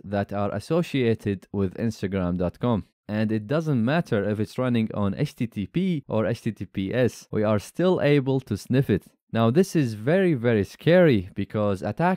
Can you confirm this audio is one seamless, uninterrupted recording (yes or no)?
no